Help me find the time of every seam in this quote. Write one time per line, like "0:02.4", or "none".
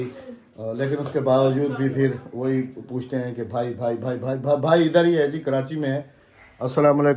none